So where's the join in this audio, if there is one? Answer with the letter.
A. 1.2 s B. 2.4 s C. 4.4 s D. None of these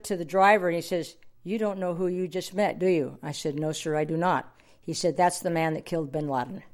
D